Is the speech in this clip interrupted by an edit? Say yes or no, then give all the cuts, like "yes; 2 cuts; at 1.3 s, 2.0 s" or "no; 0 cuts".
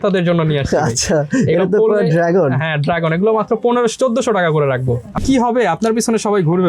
yes; 1 cut; at 5.2 s